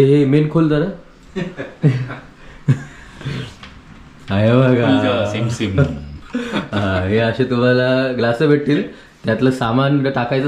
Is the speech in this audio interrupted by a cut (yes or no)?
no